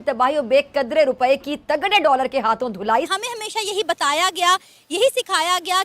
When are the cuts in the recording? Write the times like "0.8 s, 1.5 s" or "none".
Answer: 3.1 s